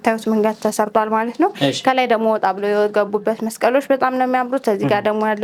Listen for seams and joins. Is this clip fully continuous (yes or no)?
yes